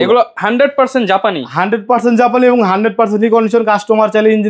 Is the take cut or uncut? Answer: uncut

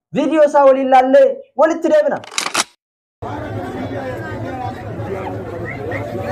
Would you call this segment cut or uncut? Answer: uncut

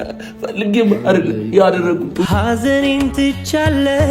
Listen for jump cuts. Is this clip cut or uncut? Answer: cut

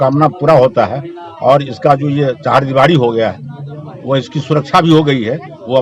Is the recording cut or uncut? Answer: uncut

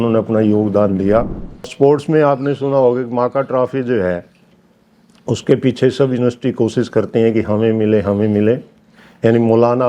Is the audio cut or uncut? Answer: cut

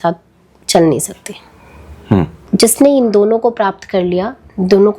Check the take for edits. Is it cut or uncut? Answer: cut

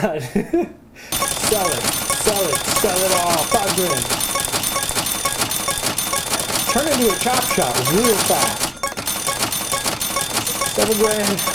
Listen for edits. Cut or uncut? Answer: uncut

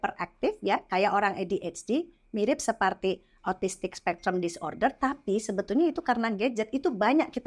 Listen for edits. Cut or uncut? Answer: uncut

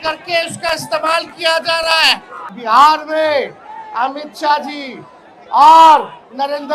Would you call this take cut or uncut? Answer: cut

